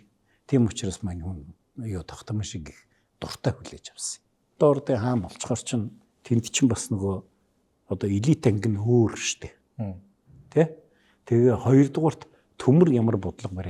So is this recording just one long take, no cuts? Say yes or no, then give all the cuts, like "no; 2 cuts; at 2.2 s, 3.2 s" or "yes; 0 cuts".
no; 1 cut; at 4.5 s